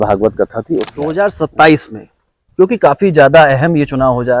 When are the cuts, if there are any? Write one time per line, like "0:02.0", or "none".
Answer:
0:01.0